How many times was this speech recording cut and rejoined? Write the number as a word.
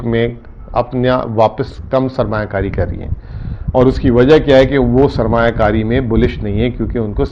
zero